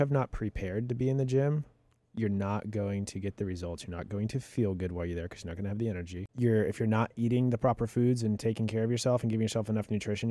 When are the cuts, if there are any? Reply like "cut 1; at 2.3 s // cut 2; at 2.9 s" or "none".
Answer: cut 1; at 6.3 s